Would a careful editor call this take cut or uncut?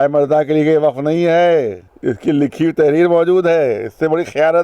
cut